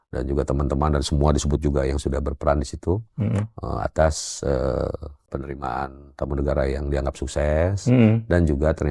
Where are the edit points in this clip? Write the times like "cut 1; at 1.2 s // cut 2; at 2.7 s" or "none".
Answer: cut 1; at 5.4 s